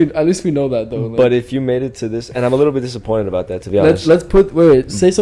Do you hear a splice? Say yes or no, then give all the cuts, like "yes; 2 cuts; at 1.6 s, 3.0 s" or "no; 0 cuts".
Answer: no; 0 cuts